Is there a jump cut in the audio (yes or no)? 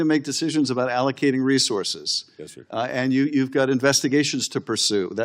no